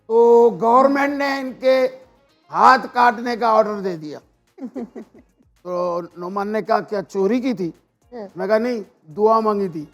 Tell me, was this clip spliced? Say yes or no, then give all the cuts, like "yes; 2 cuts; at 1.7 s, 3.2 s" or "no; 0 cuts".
no; 0 cuts